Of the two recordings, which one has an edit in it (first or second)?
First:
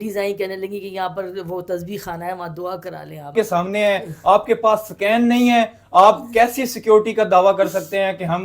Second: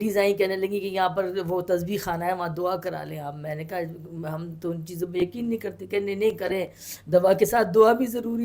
first